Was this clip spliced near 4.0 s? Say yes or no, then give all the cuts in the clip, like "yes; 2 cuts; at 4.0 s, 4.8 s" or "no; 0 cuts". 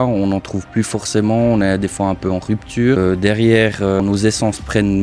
yes; 2 cuts; at 3.0 s, 4.0 s